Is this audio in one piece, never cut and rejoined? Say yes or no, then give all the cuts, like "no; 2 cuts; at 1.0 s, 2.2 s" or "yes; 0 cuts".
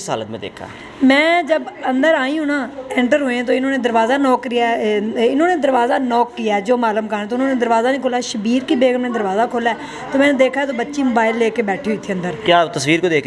yes; 0 cuts